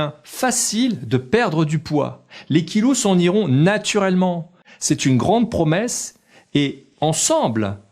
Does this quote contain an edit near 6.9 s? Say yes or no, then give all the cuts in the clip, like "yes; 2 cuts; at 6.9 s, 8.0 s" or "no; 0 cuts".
no; 1 cut; at 4.5 s